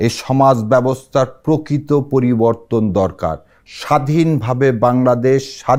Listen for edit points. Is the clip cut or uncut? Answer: uncut